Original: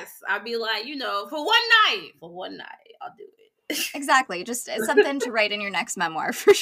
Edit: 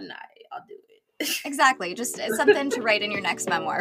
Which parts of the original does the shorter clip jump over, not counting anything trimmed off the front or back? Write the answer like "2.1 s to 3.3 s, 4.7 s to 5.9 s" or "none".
none